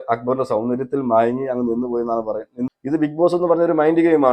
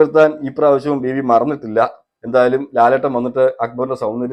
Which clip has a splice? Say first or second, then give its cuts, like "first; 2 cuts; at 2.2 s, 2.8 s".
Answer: first; 1 cut; at 2.6 s